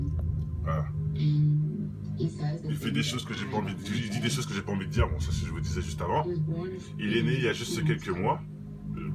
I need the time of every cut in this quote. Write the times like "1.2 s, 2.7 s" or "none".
1.3 s